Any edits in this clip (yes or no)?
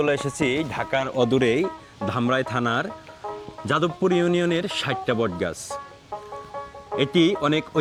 no